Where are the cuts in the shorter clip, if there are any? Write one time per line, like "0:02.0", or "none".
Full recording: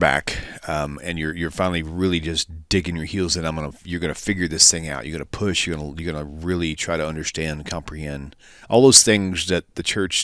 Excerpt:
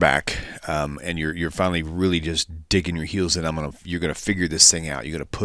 none

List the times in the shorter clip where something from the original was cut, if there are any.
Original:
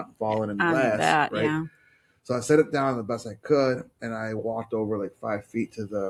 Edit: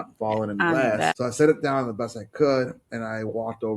0:01.1

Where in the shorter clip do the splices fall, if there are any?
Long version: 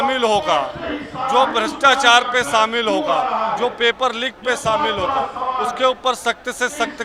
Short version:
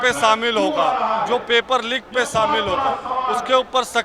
none

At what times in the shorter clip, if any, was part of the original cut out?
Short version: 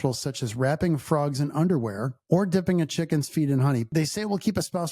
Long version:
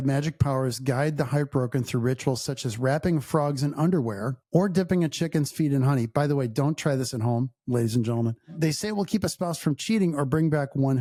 0:03.9

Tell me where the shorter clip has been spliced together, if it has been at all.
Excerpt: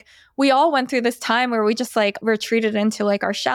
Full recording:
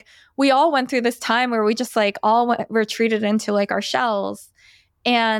0:02.2

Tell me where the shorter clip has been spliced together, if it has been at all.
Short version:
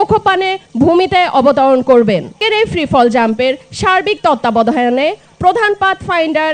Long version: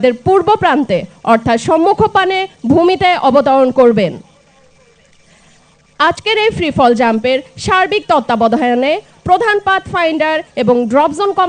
0:02.4

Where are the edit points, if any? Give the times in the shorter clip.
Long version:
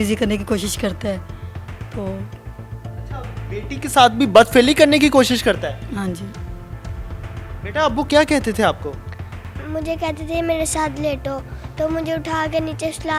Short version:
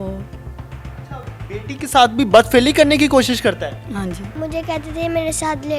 0:04.3

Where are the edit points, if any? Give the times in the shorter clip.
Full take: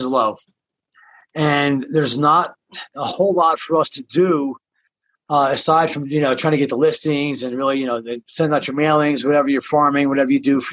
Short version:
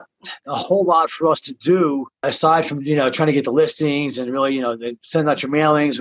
0:02.3

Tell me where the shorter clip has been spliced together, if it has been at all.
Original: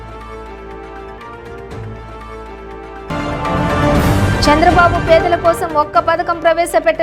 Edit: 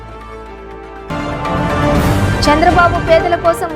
0:01.0

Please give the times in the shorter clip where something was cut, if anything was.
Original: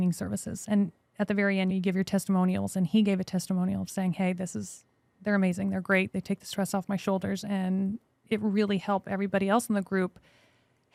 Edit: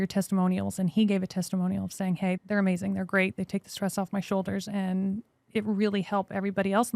0:02.4

